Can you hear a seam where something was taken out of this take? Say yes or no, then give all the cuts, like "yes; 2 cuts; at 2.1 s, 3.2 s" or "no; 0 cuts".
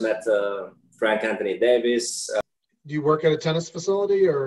yes; 1 cut; at 2.4 s